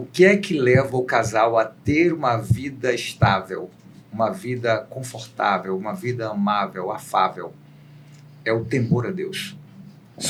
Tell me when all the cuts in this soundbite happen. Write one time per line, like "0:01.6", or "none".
none